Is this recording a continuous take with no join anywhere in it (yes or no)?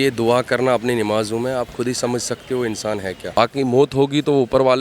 no